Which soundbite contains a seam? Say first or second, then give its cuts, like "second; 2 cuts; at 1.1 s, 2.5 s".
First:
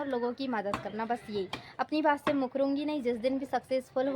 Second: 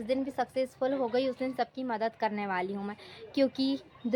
first; 1 cut; at 2.1 s